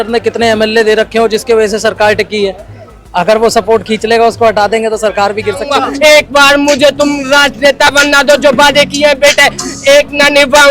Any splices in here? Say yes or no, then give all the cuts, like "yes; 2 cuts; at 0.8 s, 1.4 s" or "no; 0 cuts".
yes; 1 cut; at 5.8 s